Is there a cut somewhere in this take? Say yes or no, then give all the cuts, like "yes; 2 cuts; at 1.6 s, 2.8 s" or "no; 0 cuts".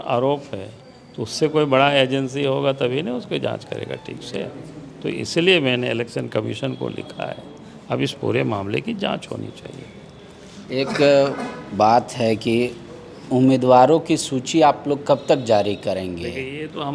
no; 0 cuts